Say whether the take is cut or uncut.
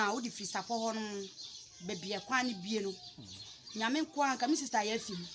uncut